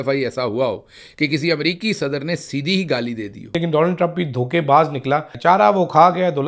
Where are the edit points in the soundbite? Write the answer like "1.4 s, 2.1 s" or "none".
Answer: 3.5 s, 5.3 s